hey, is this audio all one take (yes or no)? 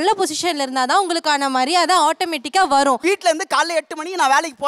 yes